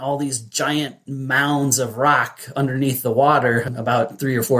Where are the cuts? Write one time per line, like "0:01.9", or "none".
none